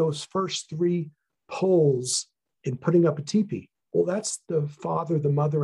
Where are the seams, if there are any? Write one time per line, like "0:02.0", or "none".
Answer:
0:03.7

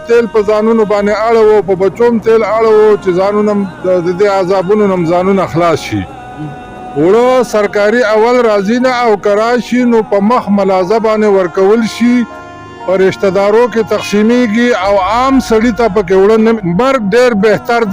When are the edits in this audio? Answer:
0:16.6

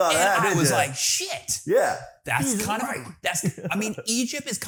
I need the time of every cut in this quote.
none

